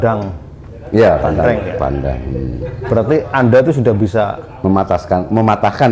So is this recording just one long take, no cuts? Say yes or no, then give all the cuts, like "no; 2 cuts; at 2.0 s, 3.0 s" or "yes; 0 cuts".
yes; 0 cuts